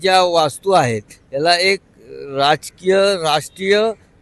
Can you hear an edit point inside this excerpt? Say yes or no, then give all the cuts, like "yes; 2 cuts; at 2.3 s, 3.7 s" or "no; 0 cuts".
no; 0 cuts